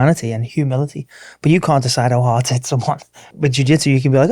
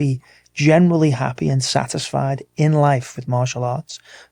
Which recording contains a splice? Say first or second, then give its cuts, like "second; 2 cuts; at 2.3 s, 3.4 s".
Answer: first; 1 cut; at 3.3 s